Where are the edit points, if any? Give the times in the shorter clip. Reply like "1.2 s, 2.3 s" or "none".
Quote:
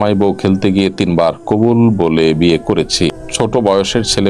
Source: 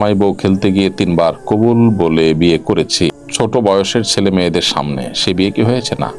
none